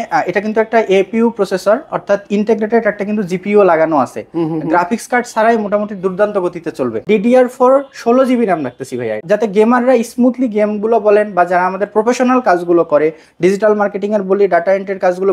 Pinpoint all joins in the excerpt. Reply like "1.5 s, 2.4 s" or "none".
7.0 s, 9.2 s